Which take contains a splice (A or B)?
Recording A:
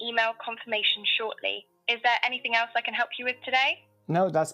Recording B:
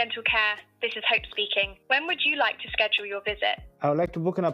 B